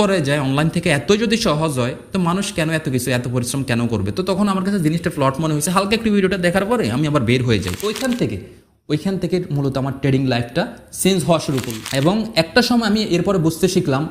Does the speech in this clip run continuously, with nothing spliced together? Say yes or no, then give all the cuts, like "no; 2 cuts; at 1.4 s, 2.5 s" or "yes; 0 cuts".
no; 2 cuts; at 7.9 s, 11.8 s